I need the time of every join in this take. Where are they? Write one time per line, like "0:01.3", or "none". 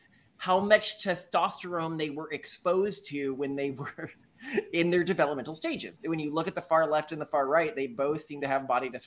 0:05.9